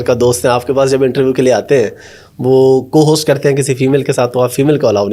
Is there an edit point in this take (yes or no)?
no